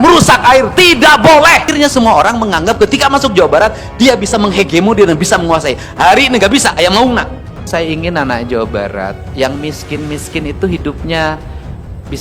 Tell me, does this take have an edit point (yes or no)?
yes